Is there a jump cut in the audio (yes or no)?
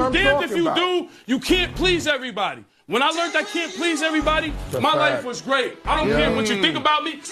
yes